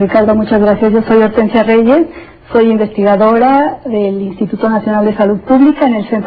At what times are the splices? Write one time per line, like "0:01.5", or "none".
none